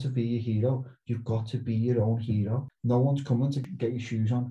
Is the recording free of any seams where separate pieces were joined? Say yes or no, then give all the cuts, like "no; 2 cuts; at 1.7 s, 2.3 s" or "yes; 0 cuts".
no; 2 cuts; at 2.6 s, 3.6 s